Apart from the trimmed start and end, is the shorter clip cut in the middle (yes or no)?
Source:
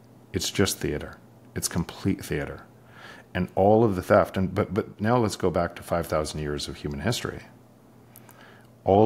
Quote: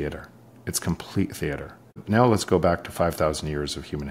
yes